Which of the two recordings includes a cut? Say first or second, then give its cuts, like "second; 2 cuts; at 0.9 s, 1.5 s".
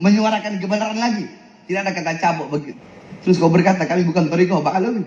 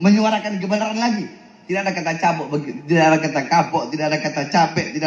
first; 1 cut; at 2.7 s